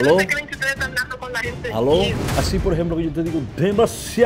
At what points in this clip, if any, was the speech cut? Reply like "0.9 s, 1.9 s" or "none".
2.2 s

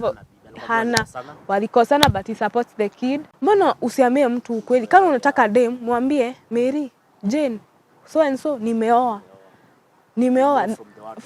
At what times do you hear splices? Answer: 3.3 s

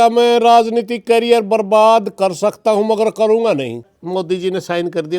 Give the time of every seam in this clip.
4.0 s

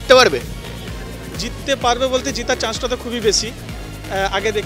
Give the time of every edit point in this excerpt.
none

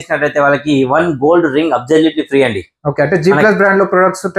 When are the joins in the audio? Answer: none

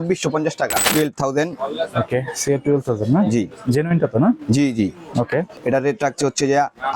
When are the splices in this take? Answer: 0.8 s, 5.5 s

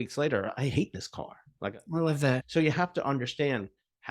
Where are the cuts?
2.4 s

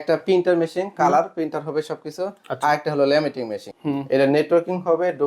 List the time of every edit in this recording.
3.7 s

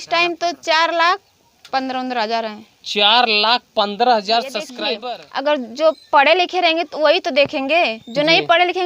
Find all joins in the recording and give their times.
4.8 s

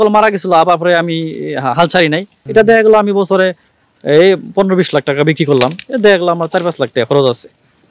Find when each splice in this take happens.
2.3 s

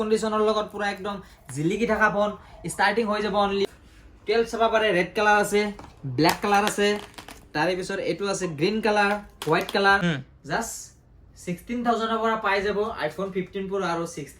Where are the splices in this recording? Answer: 3.6 s, 10.0 s

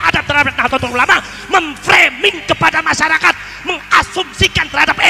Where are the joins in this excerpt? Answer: none

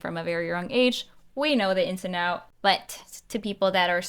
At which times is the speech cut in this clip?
2.5 s

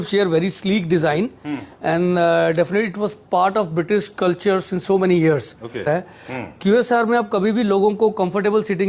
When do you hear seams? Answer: 5.9 s

